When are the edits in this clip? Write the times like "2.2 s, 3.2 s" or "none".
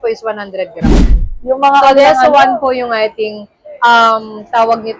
1.0 s

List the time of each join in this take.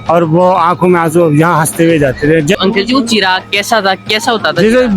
2.5 s

